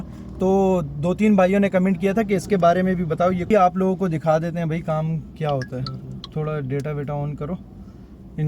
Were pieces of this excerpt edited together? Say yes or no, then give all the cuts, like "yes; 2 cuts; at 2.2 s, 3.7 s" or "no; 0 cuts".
yes; 1 cut; at 3.4 s